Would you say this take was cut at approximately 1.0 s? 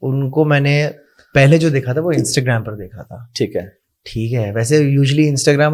no; 0 cuts

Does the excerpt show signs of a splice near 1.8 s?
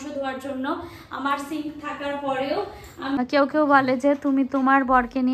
no; 1 cut; at 3.2 s

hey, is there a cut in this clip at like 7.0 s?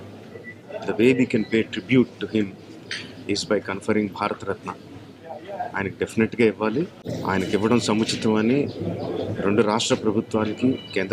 yes; 1 cut; at 7.0 s

